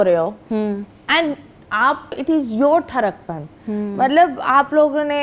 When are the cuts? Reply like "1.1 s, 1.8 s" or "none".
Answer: 2.2 s